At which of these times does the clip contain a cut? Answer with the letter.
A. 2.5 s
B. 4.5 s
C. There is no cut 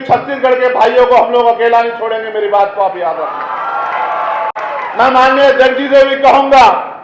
C